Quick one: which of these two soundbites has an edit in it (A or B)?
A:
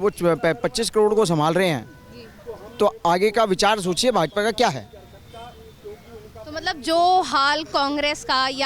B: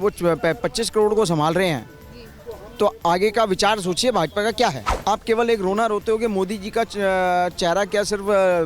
B